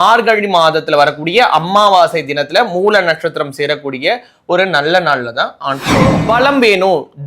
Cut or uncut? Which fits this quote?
cut